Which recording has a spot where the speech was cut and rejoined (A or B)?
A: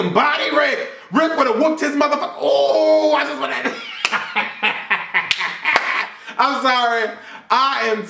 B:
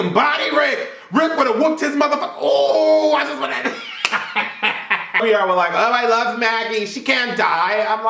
B